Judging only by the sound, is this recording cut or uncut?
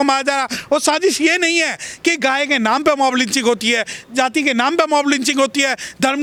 uncut